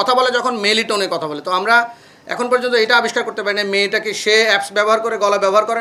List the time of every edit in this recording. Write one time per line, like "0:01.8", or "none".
none